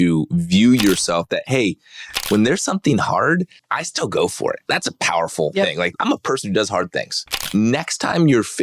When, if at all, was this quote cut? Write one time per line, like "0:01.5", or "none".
0:03.6
0:04.6
0:05.9
0:07.4

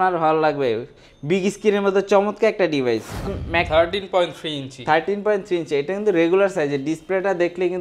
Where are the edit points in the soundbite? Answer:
0:03.3

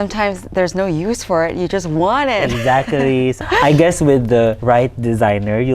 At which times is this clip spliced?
0:03.4
0:04.6

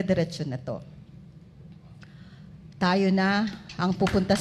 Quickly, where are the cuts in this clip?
none

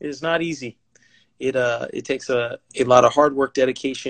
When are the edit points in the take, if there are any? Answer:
0:02.6

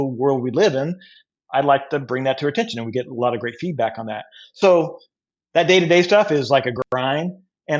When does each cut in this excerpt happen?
none

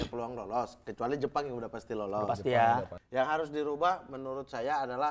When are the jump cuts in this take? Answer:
0:03.0

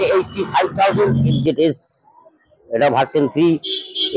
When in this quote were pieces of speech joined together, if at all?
0:01.4

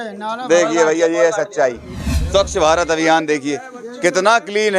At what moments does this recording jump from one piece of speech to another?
0:02.1

